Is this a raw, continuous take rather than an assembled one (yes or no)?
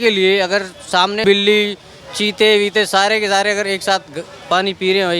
no